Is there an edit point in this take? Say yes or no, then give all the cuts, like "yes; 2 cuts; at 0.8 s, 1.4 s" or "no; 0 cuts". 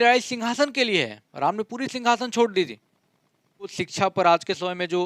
yes; 1 cut; at 3.8 s